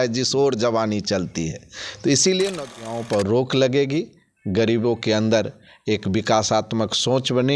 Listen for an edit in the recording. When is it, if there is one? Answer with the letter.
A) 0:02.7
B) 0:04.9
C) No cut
A